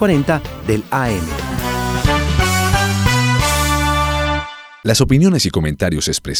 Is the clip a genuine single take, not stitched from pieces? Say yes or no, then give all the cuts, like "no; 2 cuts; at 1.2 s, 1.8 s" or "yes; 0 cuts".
yes; 0 cuts